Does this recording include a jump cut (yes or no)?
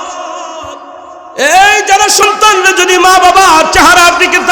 yes